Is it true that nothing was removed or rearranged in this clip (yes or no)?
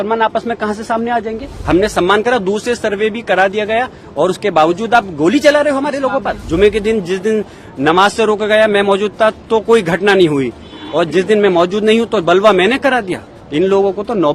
no